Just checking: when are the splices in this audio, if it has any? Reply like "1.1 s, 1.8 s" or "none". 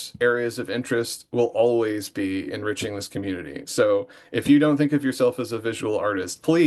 none